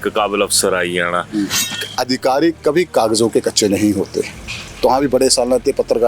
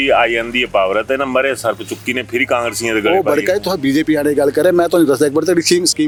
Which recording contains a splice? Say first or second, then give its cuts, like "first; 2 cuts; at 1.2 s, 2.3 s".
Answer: first; 1 cut; at 1.6 s